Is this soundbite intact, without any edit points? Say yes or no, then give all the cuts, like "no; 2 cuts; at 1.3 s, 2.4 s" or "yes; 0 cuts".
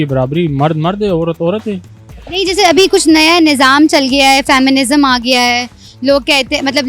yes; 0 cuts